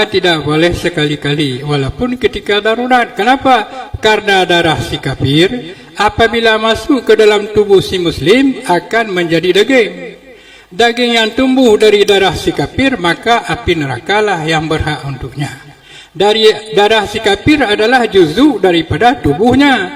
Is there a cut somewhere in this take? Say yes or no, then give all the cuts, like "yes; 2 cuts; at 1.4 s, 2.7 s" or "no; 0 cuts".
no; 0 cuts